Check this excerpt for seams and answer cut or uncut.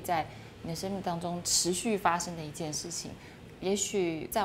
uncut